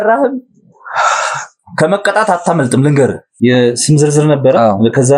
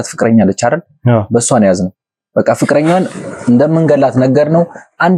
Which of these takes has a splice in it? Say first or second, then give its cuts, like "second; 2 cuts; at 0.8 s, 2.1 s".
first; 1 cut; at 3.2 s